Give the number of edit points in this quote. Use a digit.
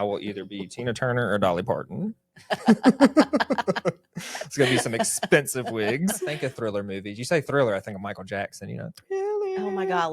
1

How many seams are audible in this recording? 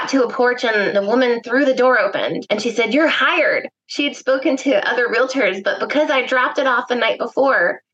2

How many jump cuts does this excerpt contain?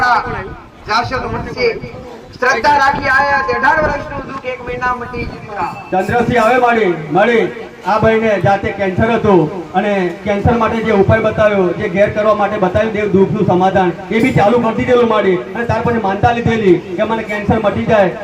1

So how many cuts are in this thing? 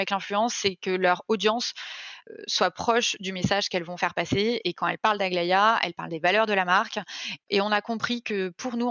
2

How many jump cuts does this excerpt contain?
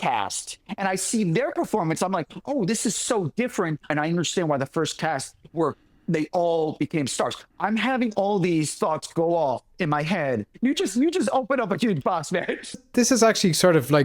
3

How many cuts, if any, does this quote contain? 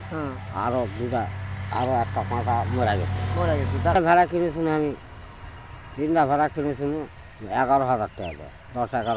1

